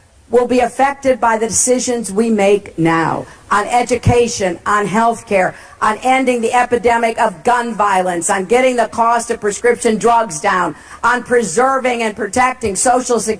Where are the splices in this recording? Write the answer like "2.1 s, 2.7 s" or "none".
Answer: 2.4 s